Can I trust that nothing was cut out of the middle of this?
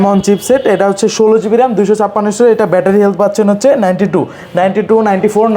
yes; 0 cuts

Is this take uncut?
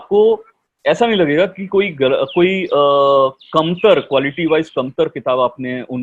yes; 0 cuts

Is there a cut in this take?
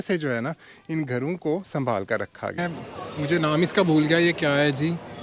yes; 1 cut; at 2.6 s

